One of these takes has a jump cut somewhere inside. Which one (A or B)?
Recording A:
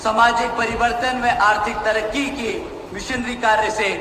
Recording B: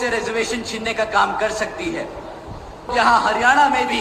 B